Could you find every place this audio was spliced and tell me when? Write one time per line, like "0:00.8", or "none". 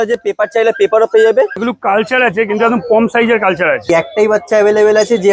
0:01.6
0:03.9